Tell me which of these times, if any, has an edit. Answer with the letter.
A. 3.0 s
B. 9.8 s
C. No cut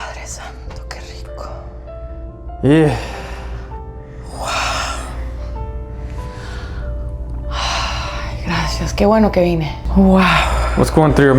B